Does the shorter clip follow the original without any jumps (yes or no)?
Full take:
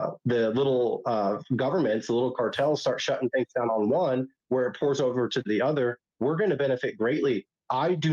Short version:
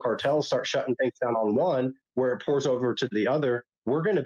yes